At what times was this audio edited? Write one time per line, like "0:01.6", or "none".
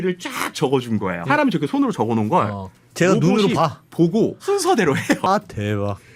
0:01.2
0:04.4
0:05.3